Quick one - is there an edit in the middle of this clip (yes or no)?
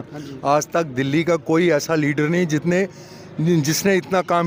no